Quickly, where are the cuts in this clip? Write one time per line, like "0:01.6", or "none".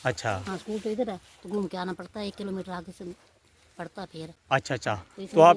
none